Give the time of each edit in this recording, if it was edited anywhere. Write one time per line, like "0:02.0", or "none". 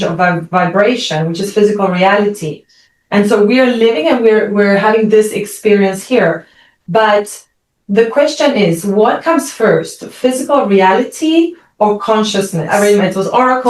0:12.6